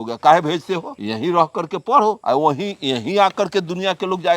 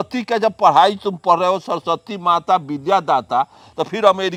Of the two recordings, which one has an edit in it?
first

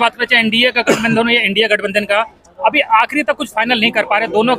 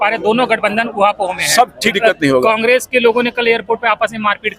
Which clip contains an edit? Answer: second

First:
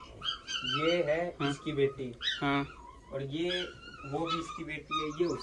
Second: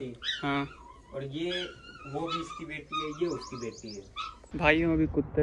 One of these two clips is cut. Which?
second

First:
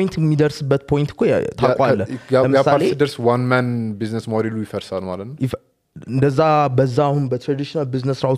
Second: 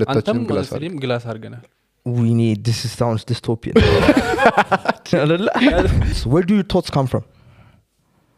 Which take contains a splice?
second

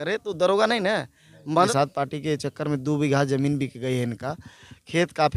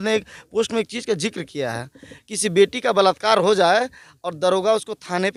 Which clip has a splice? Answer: first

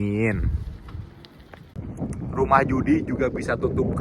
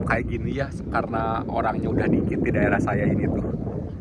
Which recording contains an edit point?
first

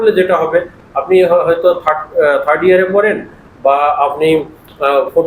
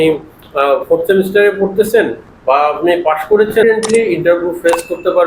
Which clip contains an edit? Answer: second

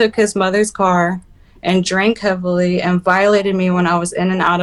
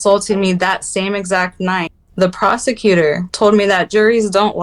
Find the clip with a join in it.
second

